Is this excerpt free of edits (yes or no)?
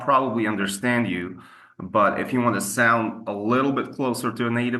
yes